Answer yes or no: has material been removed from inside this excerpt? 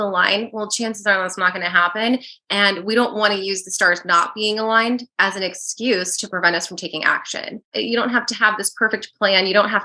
yes